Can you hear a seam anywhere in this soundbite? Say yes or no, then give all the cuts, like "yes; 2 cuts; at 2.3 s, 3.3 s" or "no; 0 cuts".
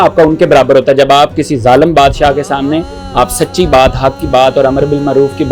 no; 0 cuts